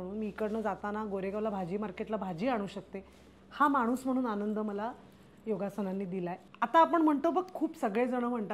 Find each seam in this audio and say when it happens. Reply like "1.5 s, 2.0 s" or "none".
6.4 s

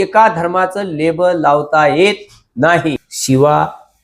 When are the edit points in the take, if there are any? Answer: 3.1 s

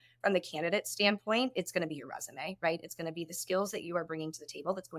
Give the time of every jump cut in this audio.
none

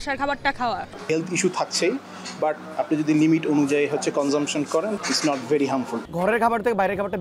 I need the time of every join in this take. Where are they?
1.0 s, 2.6 s, 5.0 s, 6.0 s

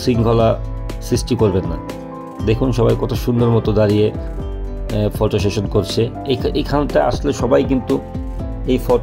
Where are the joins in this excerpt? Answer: none

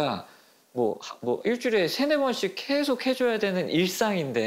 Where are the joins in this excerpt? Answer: none

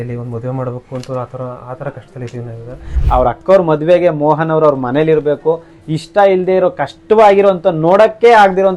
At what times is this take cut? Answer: 2.9 s, 5.8 s

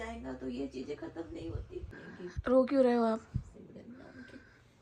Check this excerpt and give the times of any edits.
2.0 s

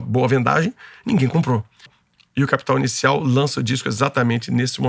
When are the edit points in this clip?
1.9 s

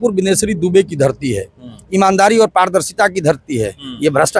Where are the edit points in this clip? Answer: none

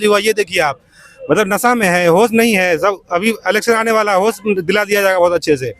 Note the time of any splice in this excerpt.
none

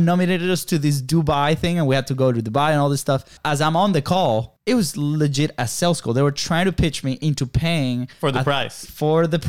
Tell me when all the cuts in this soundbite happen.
3.4 s, 4.5 s

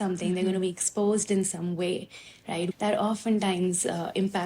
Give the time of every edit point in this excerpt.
2.7 s

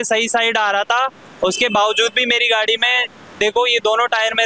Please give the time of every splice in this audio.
none

